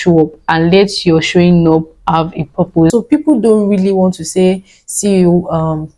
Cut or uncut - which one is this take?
cut